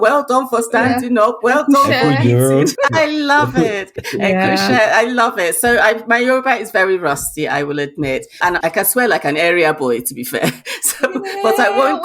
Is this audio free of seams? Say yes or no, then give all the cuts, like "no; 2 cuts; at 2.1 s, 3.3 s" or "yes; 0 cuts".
no; 3 cuts; at 2.7 s, 4.0 s, 8.4 s